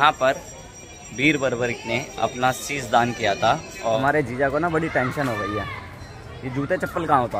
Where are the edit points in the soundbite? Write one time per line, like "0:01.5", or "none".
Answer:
0:03.7